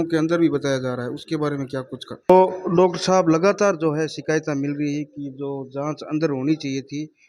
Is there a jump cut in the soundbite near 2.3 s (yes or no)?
yes